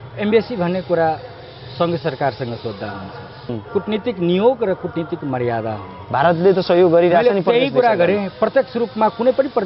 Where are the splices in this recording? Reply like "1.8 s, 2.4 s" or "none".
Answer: 3.6 s